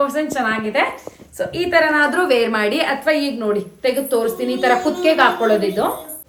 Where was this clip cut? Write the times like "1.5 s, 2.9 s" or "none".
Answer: none